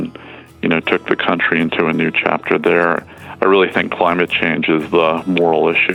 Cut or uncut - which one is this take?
uncut